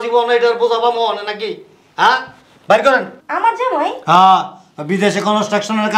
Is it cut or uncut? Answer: cut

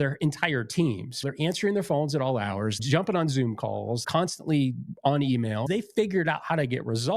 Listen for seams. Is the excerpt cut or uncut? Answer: cut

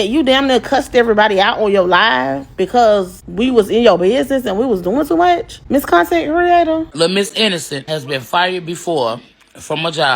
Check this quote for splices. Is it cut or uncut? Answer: cut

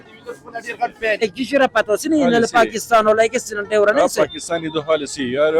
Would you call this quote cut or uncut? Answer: cut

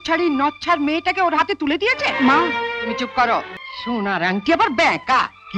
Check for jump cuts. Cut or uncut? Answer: cut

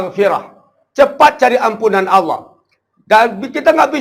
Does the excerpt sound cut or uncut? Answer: uncut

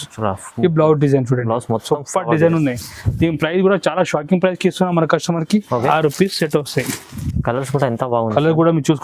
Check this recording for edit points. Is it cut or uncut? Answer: cut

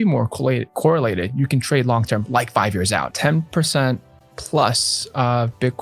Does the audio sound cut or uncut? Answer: cut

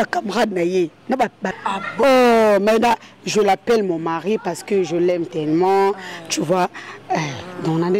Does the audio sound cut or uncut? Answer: cut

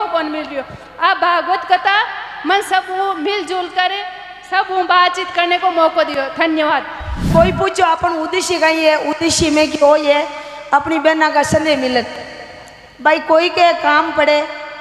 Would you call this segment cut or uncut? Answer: cut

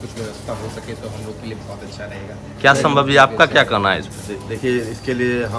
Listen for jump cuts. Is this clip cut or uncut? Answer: uncut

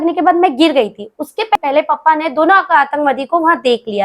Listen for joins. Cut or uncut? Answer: cut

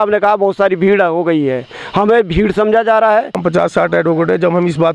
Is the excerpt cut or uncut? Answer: cut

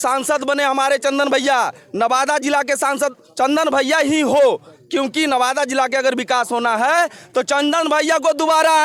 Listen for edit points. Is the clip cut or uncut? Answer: uncut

